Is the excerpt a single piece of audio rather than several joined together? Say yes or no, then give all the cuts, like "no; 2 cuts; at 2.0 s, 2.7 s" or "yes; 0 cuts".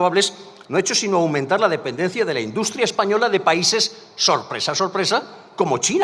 yes; 0 cuts